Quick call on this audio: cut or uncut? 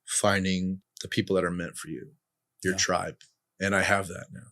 cut